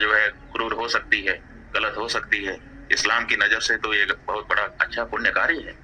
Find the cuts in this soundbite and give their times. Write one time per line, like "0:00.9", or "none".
none